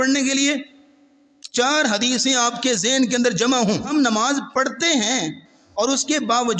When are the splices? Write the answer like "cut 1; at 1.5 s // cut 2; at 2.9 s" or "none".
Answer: cut 1; at 3.9 s

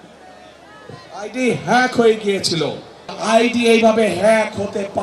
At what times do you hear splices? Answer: cut 1; at 3.2 s

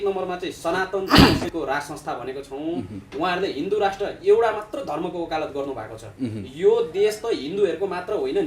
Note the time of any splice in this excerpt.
cut 1; at 1.5 s

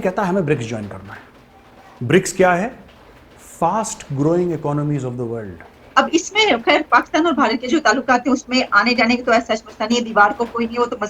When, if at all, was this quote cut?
cut 1; at 5.7 s

